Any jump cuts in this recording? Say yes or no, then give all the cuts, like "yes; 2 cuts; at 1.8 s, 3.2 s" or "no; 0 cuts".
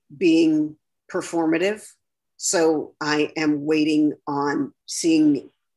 no; 0 cuts